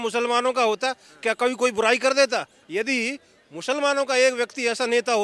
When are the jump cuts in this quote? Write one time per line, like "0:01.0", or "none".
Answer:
0:02.6